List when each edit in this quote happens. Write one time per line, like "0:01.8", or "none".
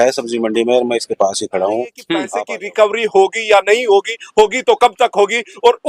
0:02.3

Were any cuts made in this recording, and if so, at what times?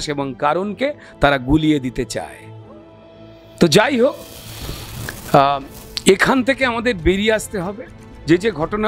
none

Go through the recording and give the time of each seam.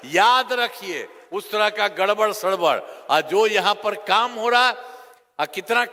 none

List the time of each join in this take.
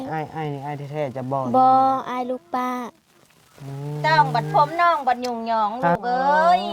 0:04.0

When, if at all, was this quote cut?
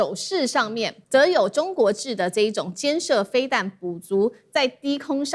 0:01.0

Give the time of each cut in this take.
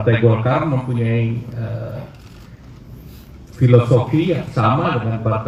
none

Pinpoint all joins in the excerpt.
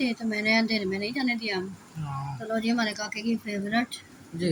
none

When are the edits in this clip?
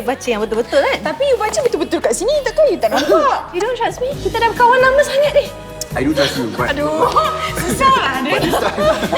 0:03.5

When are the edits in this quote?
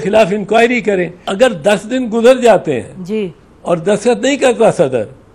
0:01.2

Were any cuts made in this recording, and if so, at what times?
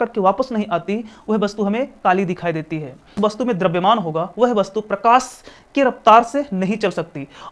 0:03.1

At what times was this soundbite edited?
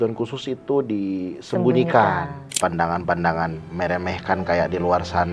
0:02.6

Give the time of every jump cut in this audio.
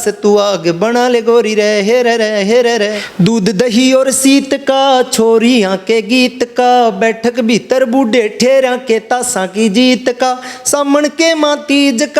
0:03.0

